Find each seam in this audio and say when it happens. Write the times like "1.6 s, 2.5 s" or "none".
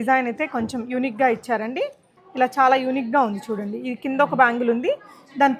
2.2 s